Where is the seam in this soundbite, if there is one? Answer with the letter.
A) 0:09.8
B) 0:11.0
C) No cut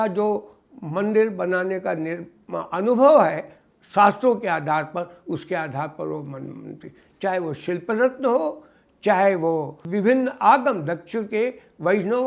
A